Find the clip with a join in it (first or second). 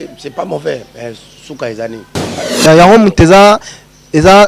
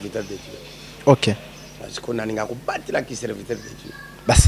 first